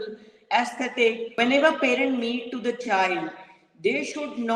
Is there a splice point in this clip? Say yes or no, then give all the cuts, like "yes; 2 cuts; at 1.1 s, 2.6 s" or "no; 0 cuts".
yes; 1 cut; at 1.3 s